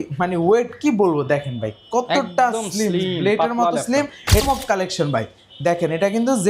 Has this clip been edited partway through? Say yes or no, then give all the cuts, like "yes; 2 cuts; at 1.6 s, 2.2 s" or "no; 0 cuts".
yes; 1 cut; at 4.4 s